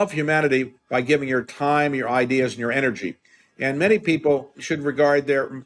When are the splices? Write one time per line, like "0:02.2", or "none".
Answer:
0:04.6